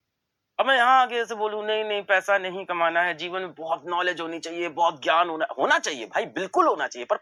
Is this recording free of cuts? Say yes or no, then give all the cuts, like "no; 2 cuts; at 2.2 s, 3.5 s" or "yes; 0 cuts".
yes; 0 cuts